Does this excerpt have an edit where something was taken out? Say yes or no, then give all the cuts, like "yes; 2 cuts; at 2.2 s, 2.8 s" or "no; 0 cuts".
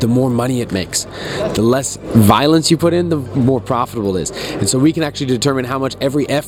no; 0 cuts